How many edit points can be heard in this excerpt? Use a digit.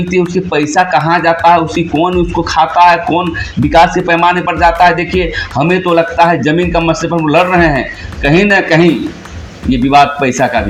0